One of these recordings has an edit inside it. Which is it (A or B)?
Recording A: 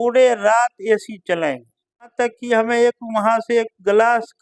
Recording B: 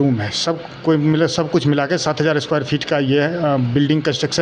A